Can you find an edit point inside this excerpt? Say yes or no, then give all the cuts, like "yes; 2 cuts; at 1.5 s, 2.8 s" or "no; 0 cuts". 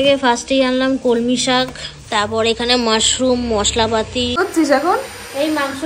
yes; 1 cut; at 4.3 s